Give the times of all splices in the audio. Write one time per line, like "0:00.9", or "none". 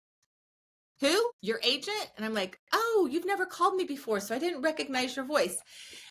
0:01.4